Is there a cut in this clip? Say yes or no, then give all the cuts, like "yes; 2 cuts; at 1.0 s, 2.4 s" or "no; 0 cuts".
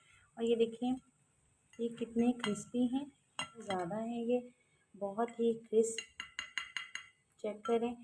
yes; 1 cut; at 3.7 s